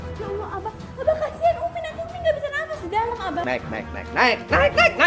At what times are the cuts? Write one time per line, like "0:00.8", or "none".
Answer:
0:03.4